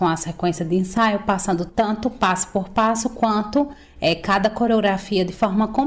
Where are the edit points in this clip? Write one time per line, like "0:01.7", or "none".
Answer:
0:01.7